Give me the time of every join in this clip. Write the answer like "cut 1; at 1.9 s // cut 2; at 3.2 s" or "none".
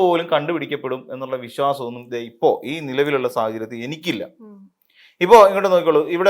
none